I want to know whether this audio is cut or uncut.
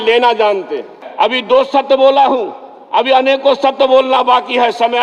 cut